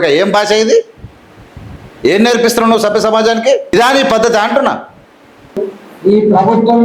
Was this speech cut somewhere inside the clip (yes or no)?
yes